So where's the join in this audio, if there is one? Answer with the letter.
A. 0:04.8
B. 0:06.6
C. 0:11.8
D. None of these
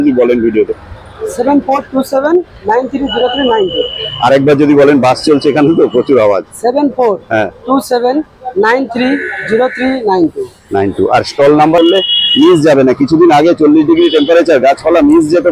C